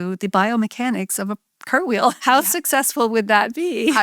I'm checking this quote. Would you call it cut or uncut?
cut